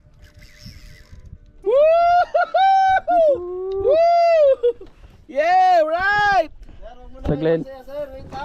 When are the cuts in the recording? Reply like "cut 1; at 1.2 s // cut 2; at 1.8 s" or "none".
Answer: cut 1; at 1.4 s